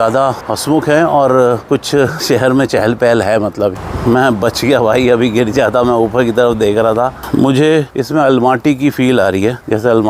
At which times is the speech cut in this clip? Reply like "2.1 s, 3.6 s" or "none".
3.7 s, 7.2 s